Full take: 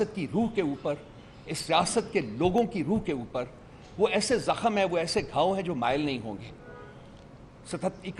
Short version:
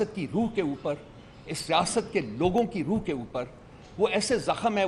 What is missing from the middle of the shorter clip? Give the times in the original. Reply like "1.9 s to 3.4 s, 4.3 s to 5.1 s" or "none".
none